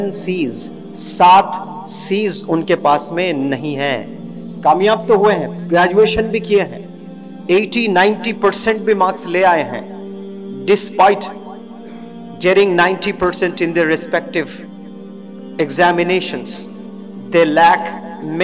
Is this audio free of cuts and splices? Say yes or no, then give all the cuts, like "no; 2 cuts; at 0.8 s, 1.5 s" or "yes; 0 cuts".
yes; 0 cuts